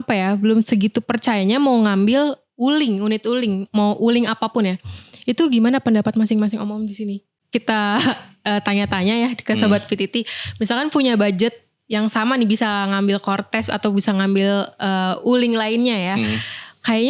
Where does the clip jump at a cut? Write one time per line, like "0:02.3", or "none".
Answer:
0:07.4